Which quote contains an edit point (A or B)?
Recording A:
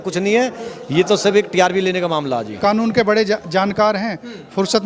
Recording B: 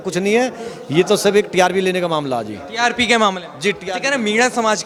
A